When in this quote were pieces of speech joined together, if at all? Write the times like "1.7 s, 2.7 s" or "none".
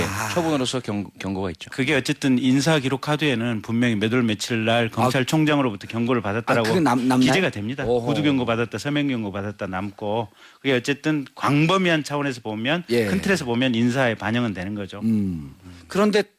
none